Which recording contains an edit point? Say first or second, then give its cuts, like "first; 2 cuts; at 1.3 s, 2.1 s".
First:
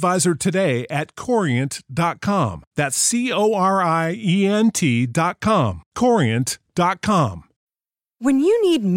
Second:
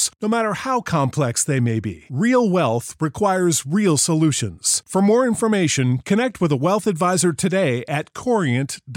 first; 1 cut; at 7.5 s